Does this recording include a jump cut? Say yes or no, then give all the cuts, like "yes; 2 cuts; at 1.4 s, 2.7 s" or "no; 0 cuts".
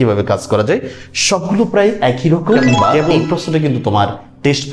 yes; 1 cut; at 3.2 s